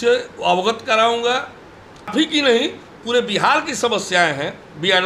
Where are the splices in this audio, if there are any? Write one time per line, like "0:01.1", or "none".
0:02.1